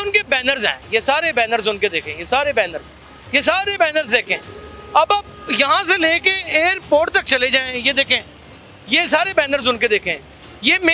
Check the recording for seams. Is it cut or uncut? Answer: uncut